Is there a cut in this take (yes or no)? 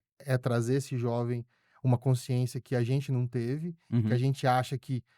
no